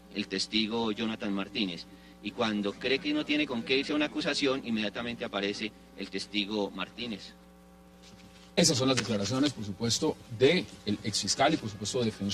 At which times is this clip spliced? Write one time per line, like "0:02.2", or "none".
0:02.3